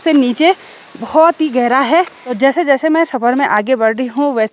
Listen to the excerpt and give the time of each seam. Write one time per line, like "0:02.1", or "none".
0:02.2